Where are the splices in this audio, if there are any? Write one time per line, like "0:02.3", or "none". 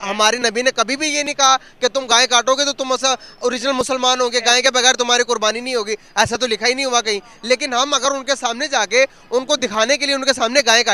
none